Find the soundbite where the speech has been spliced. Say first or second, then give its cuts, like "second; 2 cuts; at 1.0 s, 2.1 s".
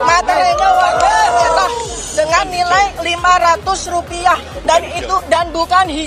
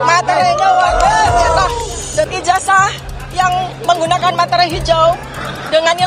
second; 1 cut; at 2.3 s